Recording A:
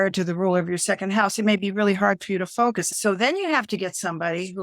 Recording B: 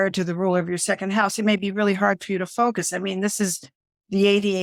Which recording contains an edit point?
A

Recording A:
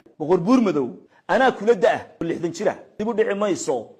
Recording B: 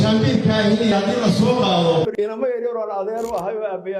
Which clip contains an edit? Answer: B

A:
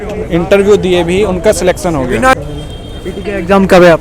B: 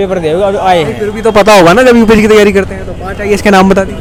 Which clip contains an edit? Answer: A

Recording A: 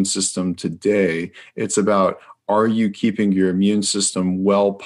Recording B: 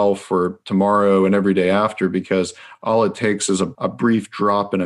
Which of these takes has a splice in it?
B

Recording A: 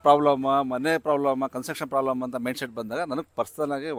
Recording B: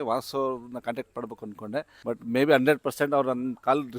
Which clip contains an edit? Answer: B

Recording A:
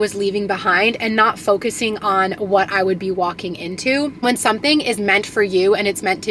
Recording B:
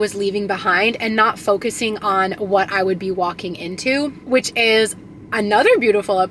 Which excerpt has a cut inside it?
A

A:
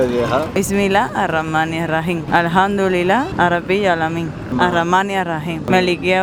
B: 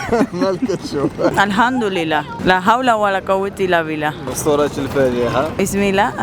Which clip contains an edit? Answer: B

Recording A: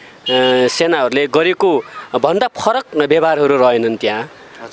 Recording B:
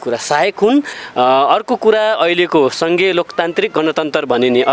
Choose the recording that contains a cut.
B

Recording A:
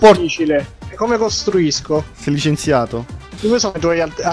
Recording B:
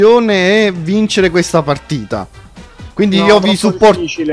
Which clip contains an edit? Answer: A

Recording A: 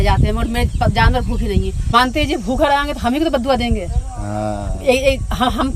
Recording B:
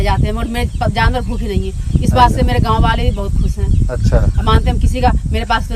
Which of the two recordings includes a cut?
A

